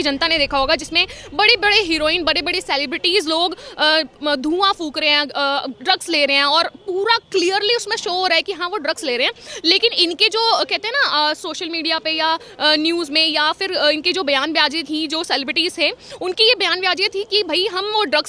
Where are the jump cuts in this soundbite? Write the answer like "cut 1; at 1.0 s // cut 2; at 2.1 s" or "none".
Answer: none